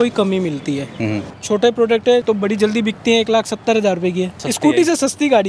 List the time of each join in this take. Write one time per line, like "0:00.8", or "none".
0:01.3
0:02.2
0:04.4